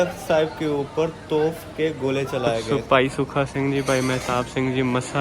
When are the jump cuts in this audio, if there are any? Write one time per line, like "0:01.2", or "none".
0:02.6